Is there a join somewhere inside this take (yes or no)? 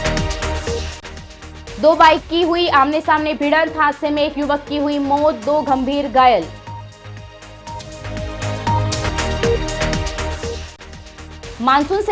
yes